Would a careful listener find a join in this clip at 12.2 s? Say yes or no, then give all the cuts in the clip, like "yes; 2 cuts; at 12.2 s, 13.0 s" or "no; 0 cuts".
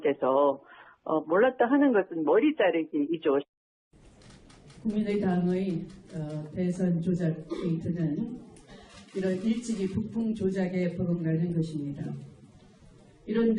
no; 0 cuts